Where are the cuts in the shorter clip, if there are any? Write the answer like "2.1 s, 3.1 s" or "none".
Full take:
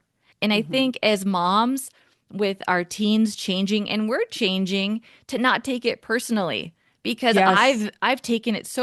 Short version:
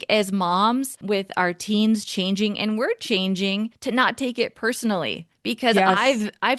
0.9 s, 3.8 s, 5.3 s